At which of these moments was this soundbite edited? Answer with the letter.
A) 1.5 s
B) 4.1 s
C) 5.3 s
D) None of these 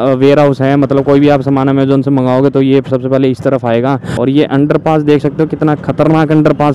B